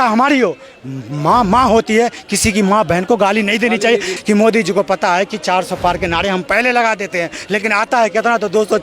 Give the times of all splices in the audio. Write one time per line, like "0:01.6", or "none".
0:04.1